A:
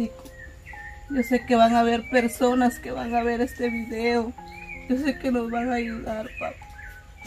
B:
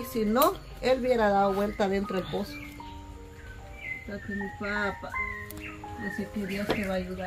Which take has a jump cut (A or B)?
B